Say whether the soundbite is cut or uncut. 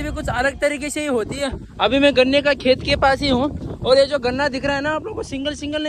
uncut